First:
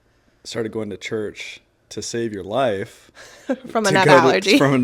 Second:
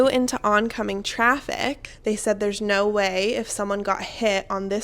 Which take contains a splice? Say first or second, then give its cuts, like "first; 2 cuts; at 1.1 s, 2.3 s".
second; 1 cut; at 1.9 s